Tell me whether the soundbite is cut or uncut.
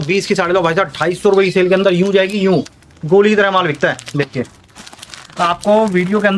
uncut